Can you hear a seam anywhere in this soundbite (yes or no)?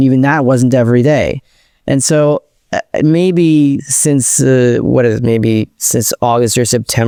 no